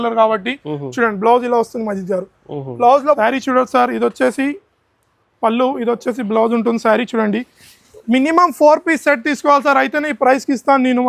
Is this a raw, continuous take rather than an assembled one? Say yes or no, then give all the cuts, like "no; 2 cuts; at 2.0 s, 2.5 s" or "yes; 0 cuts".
no; 1 cut; at 3.2 s